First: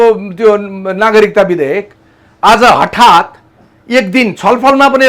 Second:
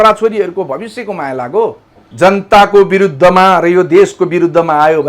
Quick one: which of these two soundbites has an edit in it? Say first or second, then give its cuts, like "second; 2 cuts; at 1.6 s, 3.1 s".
second; 1 cut; at 2.0 s